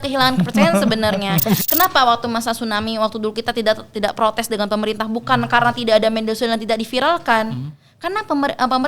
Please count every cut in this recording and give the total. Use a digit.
1